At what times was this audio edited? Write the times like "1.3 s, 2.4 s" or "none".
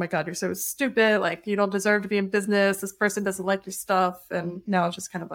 none